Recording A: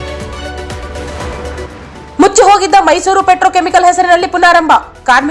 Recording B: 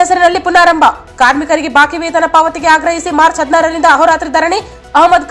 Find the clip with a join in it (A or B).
A